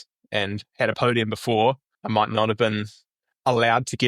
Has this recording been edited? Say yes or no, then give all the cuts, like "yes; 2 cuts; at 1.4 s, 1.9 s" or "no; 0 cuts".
yes; 1 cut; at 1.9 s